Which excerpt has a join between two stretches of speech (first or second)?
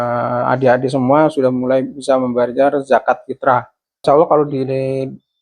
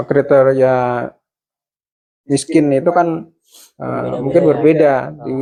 first